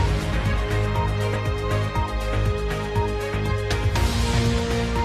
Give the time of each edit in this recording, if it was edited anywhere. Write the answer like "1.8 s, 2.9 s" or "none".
3.8 s